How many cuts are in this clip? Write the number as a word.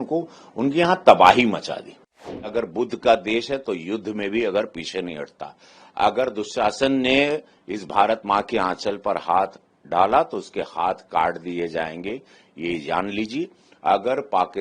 one